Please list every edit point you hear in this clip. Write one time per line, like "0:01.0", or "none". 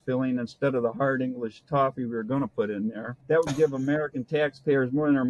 0:03.1

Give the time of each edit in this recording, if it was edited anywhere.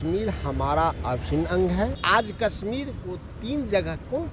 0:02.0

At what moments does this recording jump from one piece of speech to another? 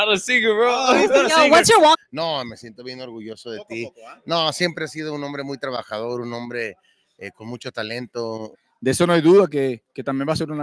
0:02.0
0:08.6

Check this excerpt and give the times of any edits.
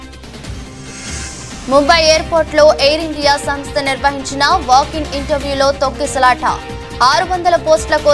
0:01.1

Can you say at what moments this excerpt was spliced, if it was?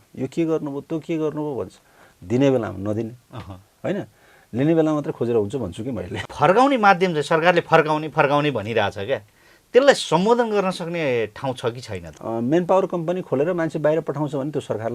0:06.2
0:12.2

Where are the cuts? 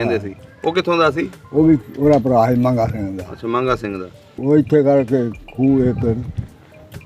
0:04.2

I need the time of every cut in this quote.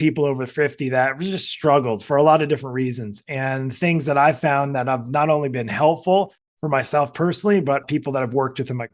none

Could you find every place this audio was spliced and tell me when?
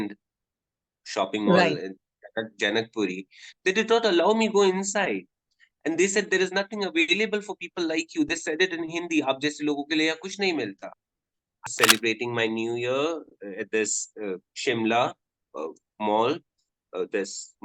0:11.6

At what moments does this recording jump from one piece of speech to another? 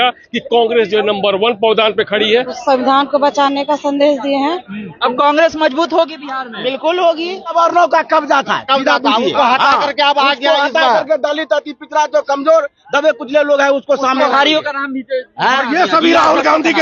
0:02.5
0:04.9
0:07.5

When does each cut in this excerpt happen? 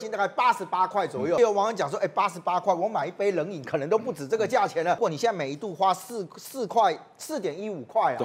0:01.4
0:05.0

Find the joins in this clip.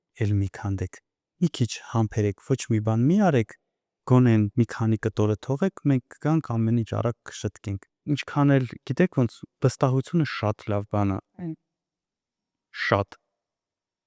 none

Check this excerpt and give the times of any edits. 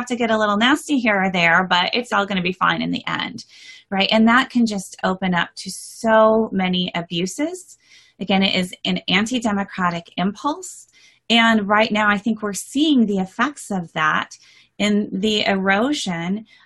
0:02.1

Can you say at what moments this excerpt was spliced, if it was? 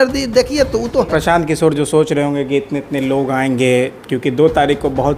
0:01.1

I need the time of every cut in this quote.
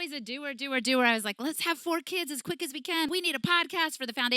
0:03.1

